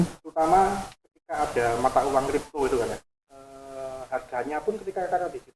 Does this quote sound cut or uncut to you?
cut